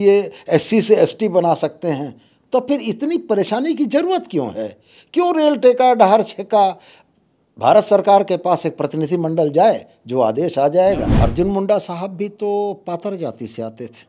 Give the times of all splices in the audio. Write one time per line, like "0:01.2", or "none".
0:11.1